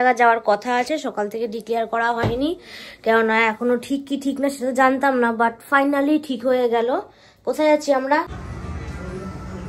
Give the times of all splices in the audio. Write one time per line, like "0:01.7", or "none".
0:08.4